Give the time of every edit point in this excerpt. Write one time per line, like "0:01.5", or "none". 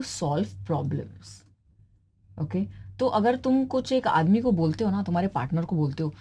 none